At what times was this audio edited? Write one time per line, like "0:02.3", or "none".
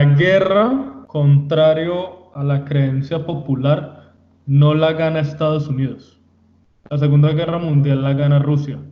none